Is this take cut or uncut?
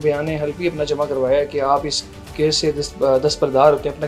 uncut